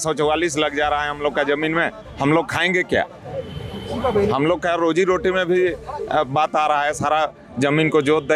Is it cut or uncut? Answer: uncut